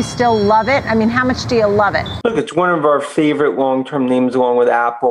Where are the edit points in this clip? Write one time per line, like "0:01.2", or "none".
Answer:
0:02.1